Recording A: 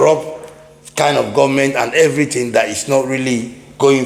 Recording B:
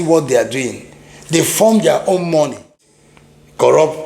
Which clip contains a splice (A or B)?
B